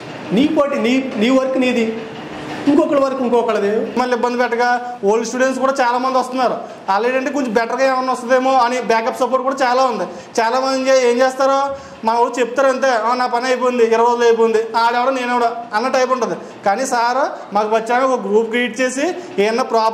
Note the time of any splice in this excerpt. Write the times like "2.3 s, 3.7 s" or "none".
3.9 s